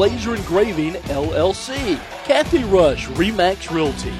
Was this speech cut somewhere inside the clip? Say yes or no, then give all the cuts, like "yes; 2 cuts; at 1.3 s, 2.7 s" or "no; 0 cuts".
yes; 1 cut; at 2.1 s